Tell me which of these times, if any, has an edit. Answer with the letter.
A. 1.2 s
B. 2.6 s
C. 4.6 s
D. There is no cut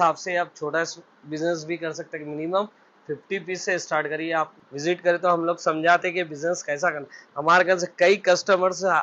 C